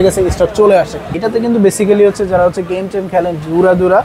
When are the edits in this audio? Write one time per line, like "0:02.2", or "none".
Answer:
0:01.1